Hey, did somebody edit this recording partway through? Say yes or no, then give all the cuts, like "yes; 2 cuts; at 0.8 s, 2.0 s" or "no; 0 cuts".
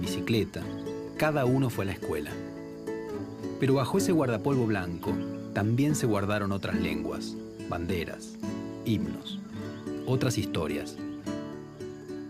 yes; 1 cut; at 11.2 s